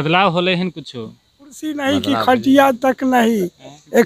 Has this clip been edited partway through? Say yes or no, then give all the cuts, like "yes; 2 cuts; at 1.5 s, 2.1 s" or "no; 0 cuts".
yes; 1 cut; at 1.9 s